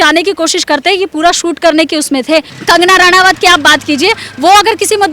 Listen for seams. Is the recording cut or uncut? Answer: cut